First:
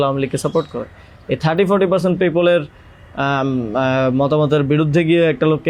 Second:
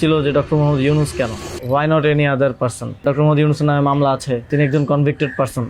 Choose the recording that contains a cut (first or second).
second